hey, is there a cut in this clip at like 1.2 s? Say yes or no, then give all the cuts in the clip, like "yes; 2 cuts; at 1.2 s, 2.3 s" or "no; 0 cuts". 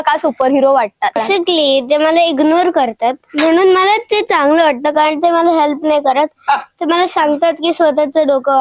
yes; 1 cut; at 1.2 s